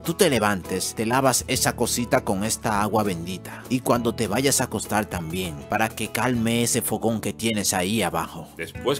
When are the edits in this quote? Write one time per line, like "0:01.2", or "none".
none